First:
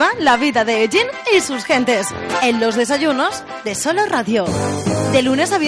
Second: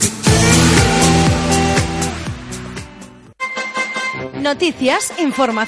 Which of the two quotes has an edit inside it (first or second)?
second